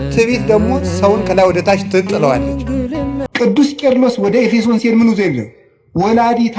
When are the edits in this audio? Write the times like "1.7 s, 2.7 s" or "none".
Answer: 3.2 s

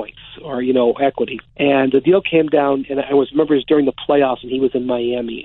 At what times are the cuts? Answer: 1.4 s

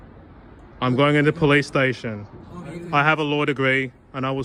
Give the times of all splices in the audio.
none

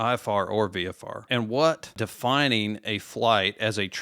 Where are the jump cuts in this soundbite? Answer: 1.3 s, 1.9 s

